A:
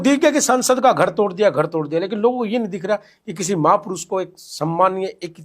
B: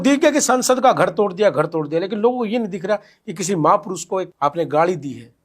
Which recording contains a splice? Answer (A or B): B